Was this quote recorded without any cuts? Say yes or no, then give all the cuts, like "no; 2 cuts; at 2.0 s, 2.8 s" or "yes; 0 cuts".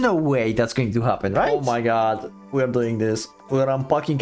no; 1 cut; at 1.6 s